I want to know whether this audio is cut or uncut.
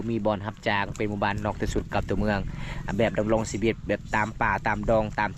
uncut